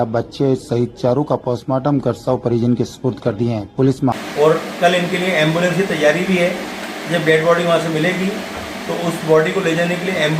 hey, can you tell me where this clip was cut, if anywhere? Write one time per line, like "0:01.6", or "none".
0:04.1